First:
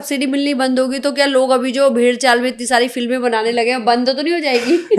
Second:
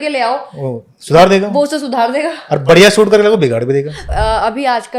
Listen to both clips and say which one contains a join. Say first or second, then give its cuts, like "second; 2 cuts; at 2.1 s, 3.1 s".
second; 1 cut; at 4.1 s